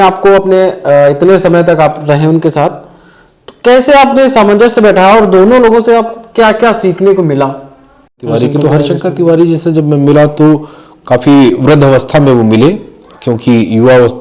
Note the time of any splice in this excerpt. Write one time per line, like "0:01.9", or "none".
0:08.2